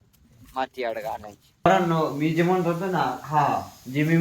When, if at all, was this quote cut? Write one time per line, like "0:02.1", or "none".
0:01.7